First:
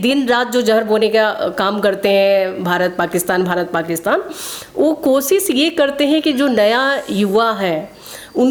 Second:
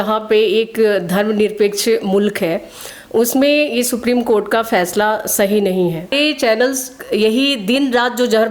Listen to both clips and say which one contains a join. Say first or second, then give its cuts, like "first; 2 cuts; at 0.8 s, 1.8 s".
second; 1 cut; at 6.1 s